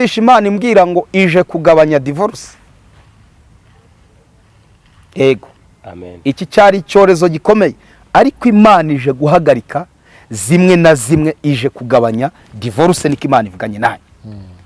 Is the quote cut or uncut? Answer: uncut